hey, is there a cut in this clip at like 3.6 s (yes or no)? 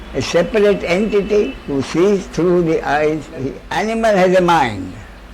yes